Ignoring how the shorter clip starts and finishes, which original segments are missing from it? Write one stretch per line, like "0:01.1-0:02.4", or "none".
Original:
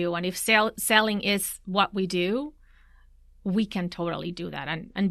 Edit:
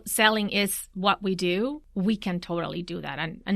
0:02.5-0:03.3